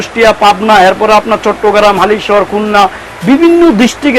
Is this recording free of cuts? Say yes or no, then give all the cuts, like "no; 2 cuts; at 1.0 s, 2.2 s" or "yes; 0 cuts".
yes; 0 cuts